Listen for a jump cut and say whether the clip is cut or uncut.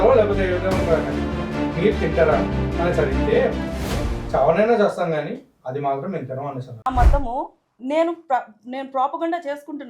cut